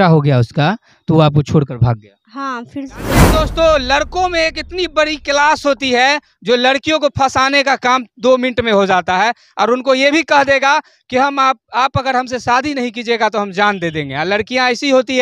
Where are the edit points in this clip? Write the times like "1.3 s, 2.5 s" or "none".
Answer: 3.3 s

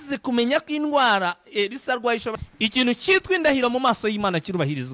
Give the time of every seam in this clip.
2.3 s

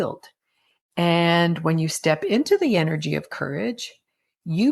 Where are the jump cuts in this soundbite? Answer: none

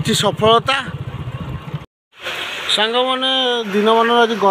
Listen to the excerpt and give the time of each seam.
1.8 s

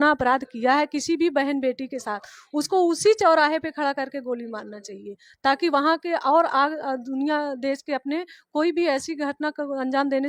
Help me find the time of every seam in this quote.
none

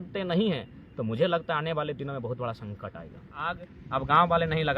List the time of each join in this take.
3.7 s

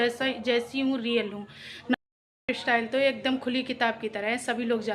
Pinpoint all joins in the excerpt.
1.9 s

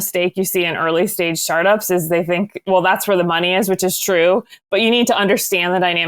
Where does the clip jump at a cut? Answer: 4.6 s

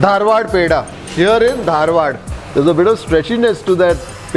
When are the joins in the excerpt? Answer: 2.2 s

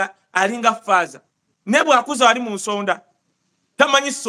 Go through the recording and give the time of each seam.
none

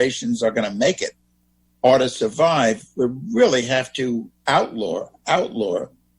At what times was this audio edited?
4.3 s

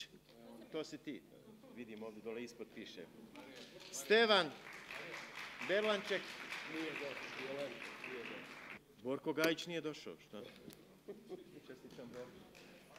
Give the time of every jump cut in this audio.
8.6 s

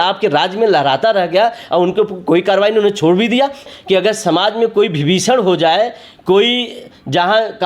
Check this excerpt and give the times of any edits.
3.7 s

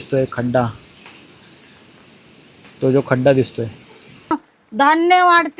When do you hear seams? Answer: 4.3 s

